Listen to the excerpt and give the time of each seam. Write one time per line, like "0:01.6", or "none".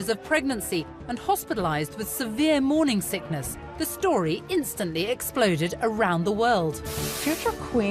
0:01.7